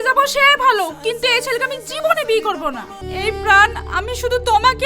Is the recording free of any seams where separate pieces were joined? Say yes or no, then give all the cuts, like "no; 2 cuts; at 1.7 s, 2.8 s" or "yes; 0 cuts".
no; 1 cut; at 3.0 s